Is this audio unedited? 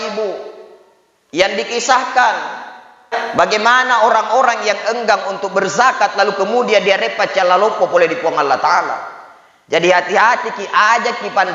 no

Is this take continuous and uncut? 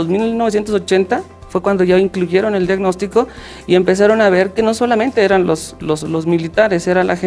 yes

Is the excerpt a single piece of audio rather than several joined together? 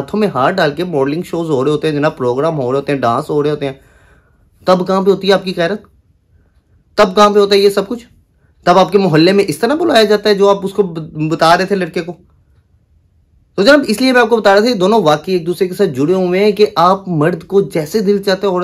yes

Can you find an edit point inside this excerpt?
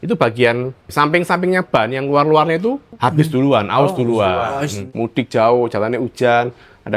yes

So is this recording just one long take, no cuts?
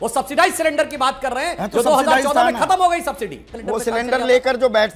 no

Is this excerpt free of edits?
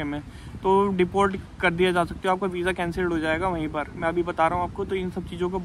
yes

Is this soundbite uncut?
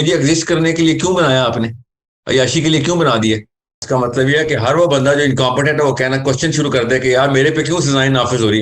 no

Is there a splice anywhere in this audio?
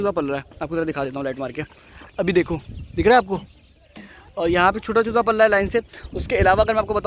no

